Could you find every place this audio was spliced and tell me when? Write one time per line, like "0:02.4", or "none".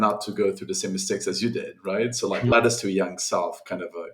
0:02.5